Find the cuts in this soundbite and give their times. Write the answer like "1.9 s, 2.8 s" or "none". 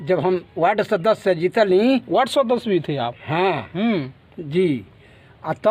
none